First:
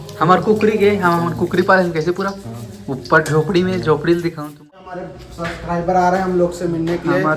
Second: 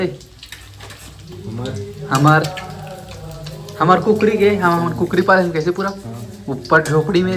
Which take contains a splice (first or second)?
first